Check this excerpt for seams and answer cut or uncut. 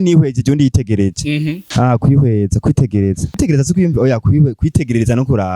cut